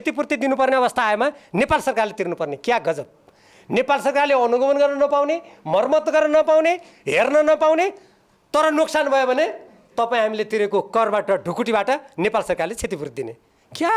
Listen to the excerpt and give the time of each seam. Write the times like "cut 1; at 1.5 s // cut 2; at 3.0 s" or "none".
none